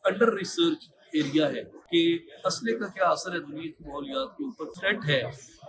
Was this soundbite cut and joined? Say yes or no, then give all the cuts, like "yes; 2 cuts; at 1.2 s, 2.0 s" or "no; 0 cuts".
yes; 2 cuts; at 1.7 s, 4.7 s